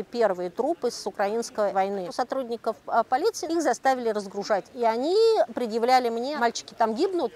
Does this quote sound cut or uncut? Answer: cut